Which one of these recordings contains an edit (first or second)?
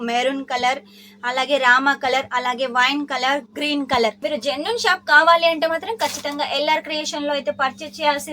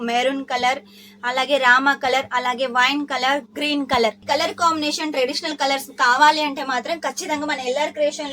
first